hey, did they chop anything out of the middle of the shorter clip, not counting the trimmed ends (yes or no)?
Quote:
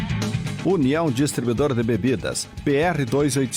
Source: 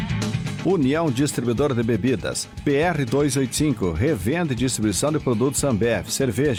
no